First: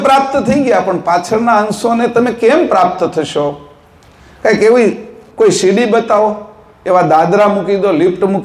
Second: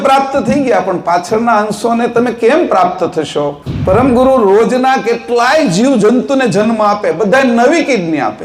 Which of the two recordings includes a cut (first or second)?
second